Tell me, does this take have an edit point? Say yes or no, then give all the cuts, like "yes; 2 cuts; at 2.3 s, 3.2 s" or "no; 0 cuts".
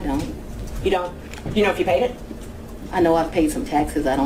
no; 0 cuts